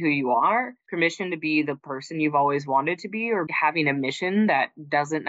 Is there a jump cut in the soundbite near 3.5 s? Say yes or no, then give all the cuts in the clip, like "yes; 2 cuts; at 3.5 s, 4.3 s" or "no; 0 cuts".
yes; 1 cut; at 3.5 s